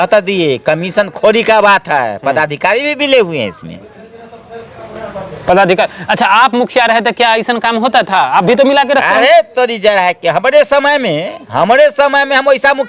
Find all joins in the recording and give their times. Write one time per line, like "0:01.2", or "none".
none